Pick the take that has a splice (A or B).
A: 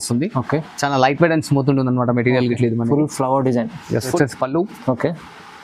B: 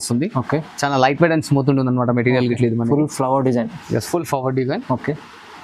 A